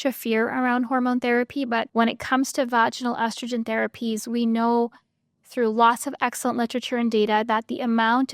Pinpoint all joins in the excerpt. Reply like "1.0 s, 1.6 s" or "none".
1.9 s